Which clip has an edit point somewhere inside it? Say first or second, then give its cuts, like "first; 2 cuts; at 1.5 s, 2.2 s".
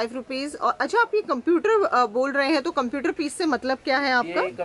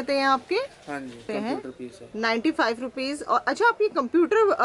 second; 1 cut; at 1.2 s